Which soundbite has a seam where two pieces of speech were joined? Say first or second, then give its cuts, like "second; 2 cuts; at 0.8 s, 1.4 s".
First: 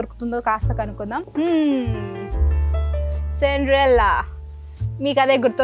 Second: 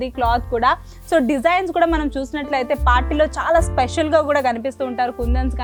first; 1 cut; at 1.3 s